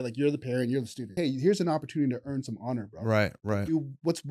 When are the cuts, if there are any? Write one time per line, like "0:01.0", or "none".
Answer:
0:01.1